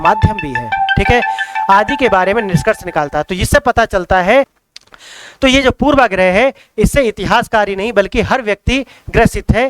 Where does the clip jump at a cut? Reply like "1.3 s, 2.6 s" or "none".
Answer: 4.6 s